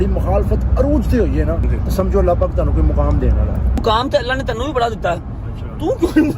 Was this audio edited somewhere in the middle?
yes; 2 cuts; at 1.7 s, 3.8 s

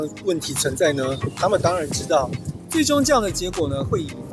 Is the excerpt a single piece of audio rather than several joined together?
no; 1 cut; at 2.5 s

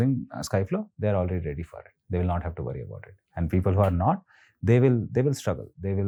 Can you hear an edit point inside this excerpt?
no; 0 cuts

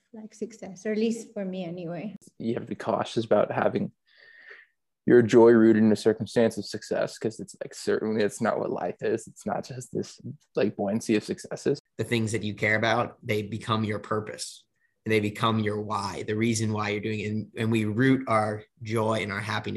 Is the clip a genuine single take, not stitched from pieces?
no; 2 cuts; at 2.2 s, 11.8 s

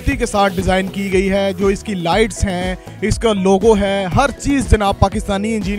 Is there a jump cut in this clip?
no; 0 cuts

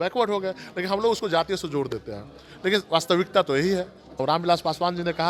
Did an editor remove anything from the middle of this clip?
yes; 1 cut; at 4.2 s

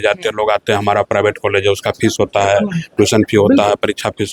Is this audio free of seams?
yes; 0 cuts

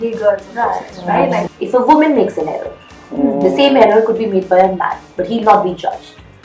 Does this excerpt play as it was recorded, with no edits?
no; 1 cut; at 1.5 s

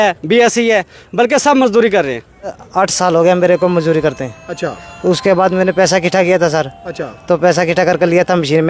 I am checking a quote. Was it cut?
yes; 1 cut; at 2.6 s

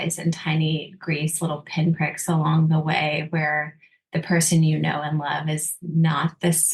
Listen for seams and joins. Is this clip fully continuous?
yes; 0 cuts

